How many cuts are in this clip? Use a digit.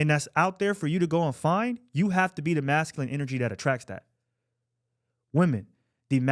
0